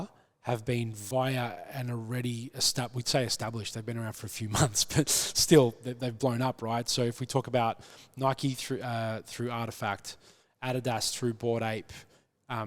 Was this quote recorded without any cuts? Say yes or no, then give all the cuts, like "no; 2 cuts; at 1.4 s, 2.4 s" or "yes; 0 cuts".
no; 1 cut; at 1.0 s